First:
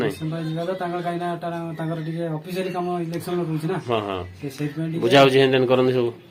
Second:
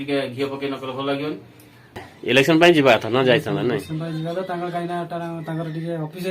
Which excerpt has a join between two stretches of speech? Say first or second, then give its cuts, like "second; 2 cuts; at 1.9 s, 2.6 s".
second; 1 cut; at 2.1 s